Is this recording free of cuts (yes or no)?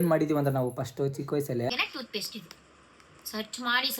no